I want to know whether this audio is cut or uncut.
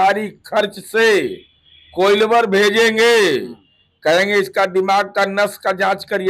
uncut